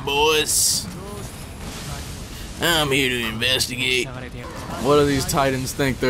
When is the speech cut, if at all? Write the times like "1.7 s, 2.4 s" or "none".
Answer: 4.4 s